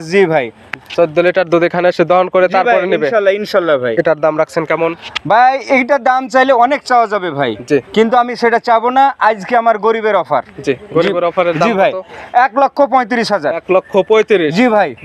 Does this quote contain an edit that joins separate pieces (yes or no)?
no